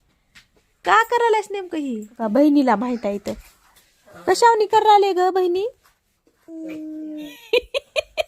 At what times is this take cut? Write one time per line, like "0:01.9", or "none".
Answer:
0:02.1
0:07.3